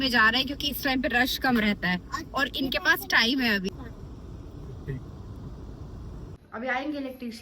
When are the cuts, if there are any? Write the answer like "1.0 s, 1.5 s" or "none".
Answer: 3.7 s, 6.4 s